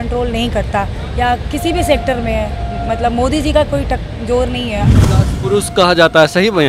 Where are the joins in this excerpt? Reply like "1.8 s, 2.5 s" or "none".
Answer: 5.0 s